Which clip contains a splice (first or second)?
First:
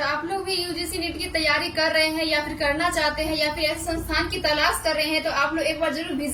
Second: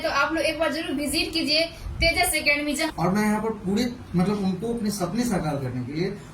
second